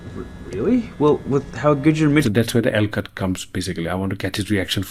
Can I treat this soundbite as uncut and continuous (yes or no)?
yes